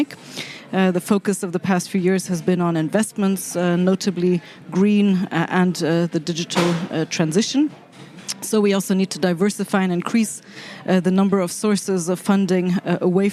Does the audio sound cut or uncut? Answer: uncut